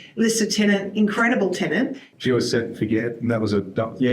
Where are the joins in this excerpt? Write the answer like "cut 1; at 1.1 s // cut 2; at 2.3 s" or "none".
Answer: cut 1; at 2.1 s

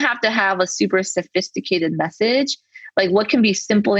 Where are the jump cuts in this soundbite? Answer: none

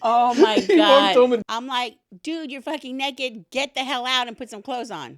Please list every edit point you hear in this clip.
cut 1; at 1.4 s

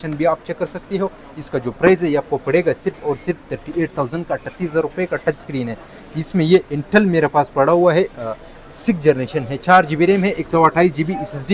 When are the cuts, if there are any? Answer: none

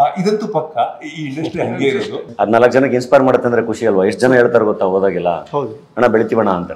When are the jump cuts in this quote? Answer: cut 1; at 2.3 s

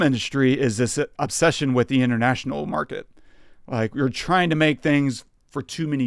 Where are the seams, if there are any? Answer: none

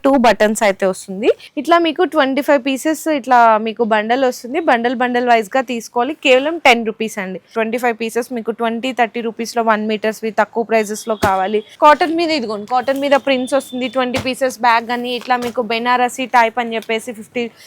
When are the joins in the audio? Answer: cut 1; at 1.5 s // cut 2; at 7.5 s // cut 3; at 11.7 s

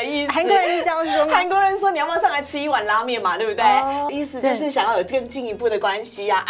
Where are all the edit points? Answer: cut 1; at 4.1 s

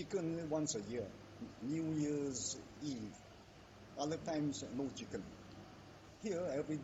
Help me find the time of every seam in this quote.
cut 1; at 1.2 s

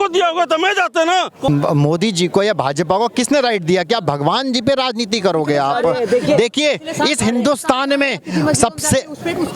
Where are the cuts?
cut 1; at 1.5 s

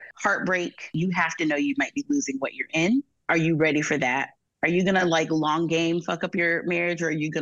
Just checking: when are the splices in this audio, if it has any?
cut 1; at 0.9 s // cut 2; at 4.4 s

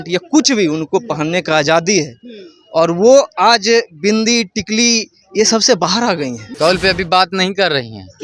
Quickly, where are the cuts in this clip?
cut 1; at 6.4 s

